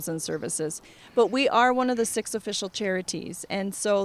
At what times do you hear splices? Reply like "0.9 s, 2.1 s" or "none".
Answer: 0.9 s